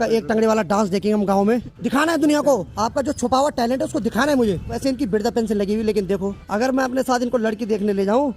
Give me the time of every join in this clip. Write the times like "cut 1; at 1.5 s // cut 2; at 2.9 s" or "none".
cut 1; at 1.7 s // cut 2; at 2.7 s // cut 3; at 4.7 s // cut 4; at 6.4 s